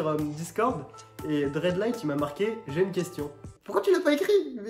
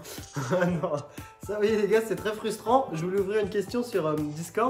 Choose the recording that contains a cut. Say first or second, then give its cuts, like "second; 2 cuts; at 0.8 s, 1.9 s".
first; 1 cut; at 3.5 s